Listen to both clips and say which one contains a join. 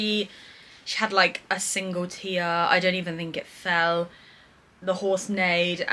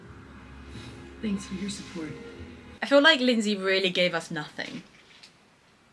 second; 1 cut; at 2.7 s

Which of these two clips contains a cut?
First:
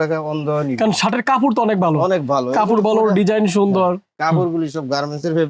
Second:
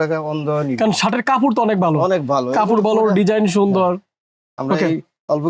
first; 1 cut; at 4.1 s

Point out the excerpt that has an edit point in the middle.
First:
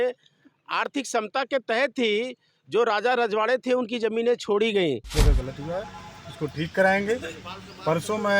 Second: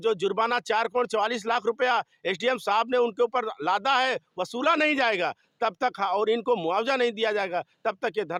first; 1 cut; at 5.1 s

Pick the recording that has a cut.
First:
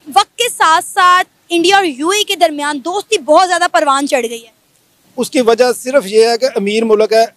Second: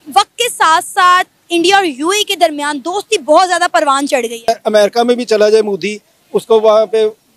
second; 1 cut; at 4.5 s

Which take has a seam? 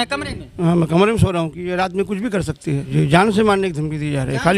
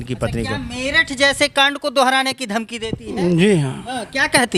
first; 1 cut; at 2.9 s

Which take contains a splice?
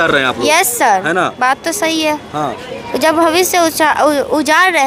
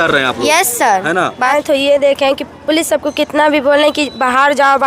second; 1 cut; at 1.5 s

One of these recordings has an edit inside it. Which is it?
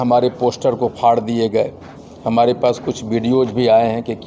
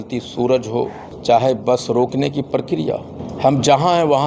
second; 2 cuts; at 1.1 s, 3.2 s

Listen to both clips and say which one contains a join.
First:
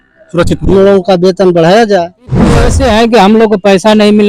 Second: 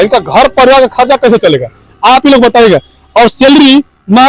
first; 1 cut; at 2.7 s

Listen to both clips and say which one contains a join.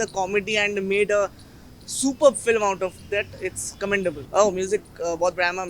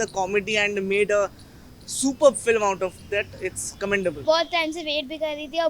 second; 1 cut; at 4.2 s

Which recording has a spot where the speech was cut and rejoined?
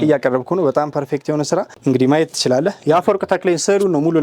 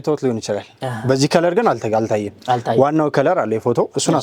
first; 1 cut; at 1.7 s

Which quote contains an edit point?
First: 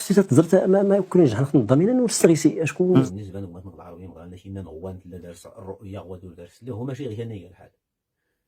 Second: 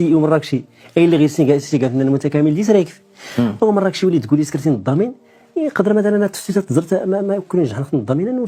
first; 1 cut; at 3.0 s

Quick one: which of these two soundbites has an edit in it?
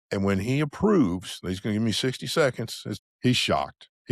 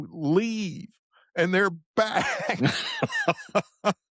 first; 1 cut; at 3.0 s

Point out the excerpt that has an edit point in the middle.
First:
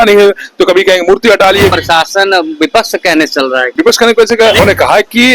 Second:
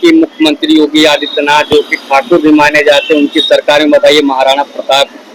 first; 3 cuts; at 1.7 s, 3.7 s, 4.6 s

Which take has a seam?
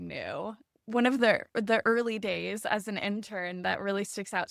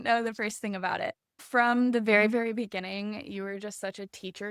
second; 1 cut; at 1.4 s

